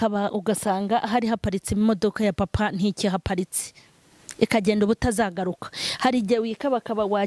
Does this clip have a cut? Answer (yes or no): no